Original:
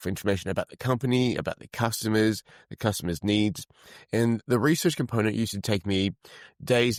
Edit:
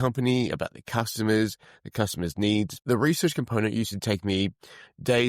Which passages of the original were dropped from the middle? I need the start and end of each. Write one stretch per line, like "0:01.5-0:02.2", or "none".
0:03.7-0:04.4

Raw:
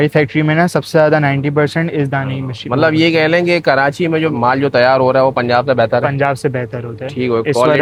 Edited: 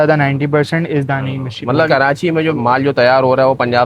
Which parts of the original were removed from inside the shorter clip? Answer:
0:02.9-0:03.6

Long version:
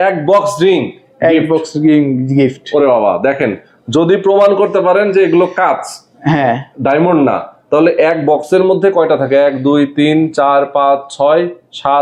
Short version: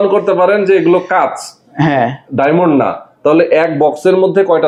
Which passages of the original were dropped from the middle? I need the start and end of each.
none

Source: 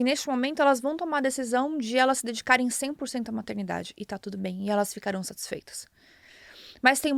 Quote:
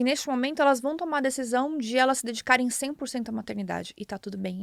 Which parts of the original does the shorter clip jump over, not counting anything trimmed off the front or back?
none

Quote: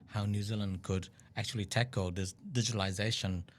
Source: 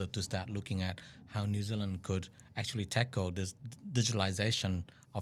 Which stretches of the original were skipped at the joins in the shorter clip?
0:03.6-0:03.8

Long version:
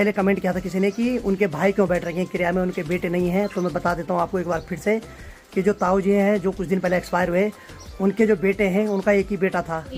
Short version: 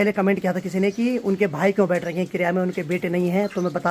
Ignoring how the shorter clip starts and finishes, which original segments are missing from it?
none

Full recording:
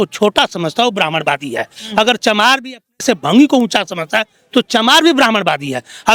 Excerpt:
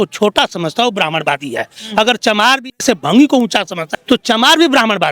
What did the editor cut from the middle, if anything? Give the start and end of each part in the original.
0:02.7-0:02.9
0:04.1-0:04.4

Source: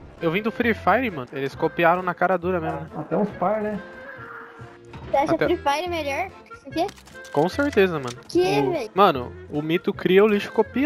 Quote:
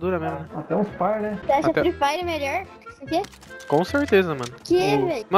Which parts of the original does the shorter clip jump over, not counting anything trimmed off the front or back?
0:03.8-0:05.0

